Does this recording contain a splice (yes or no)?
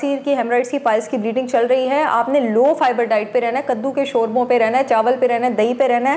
no